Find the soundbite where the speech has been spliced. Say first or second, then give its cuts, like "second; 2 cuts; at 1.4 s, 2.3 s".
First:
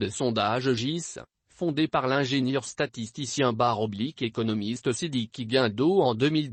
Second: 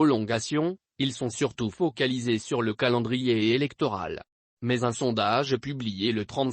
second; 1 cut; at 1.0 s